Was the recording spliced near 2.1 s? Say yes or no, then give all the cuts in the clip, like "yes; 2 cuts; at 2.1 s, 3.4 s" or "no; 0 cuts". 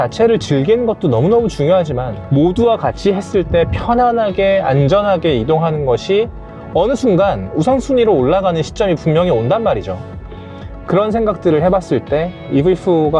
yes; 2 cuts; at 2.1 s, 12.4 s